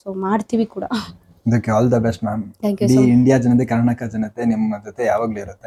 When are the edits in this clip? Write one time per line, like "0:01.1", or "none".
none